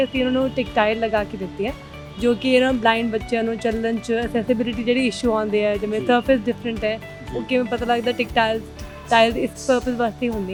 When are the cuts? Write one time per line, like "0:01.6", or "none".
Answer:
none